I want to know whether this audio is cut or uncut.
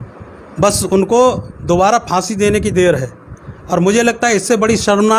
uncut